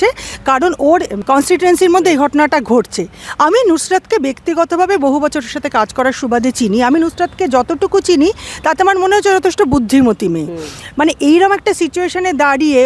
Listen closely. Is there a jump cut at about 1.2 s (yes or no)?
yes